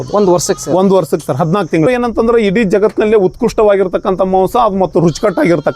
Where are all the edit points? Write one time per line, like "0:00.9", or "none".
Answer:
0:01.9